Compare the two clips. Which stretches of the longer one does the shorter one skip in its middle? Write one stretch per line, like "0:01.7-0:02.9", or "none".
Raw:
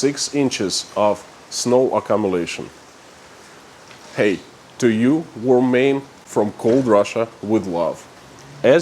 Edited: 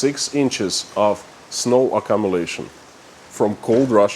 0:03.2-0:06.2